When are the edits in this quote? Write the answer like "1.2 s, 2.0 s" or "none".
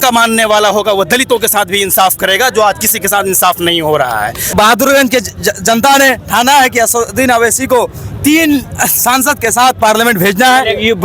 4.5 s